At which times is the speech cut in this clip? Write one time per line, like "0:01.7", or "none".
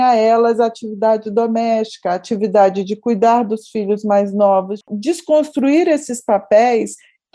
0:04.9